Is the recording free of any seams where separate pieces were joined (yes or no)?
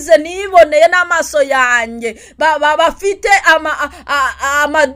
yes